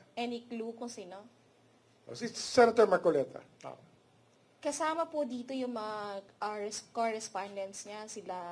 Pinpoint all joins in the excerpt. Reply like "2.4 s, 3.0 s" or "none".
3.4 s

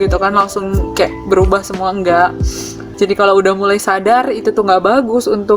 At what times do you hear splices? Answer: 2.8 s

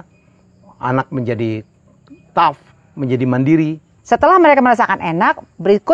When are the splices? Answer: 3.9 s

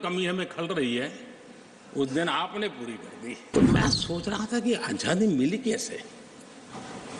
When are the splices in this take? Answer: 3.5 s

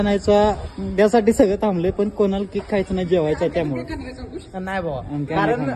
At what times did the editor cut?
none

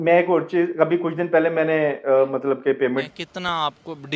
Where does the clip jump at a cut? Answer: 3.1 s

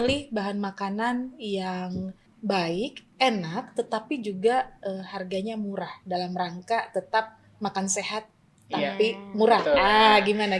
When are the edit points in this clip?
2.4 s

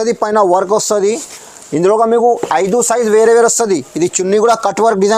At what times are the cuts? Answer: none

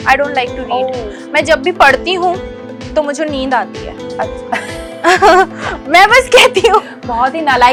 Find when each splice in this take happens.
none

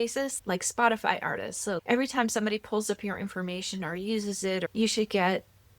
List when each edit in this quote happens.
4.7 s

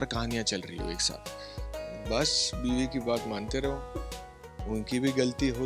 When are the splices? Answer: 1.5 s

